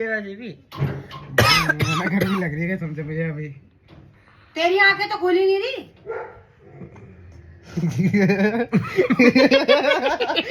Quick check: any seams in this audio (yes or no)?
no